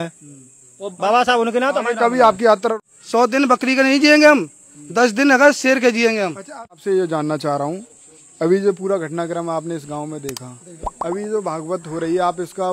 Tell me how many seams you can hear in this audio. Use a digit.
2